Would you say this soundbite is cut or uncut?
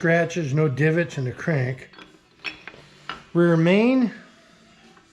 cut